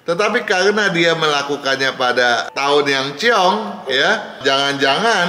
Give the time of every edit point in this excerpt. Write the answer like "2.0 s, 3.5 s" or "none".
none